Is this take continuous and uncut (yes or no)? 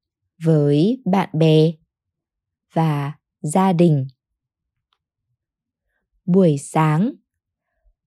no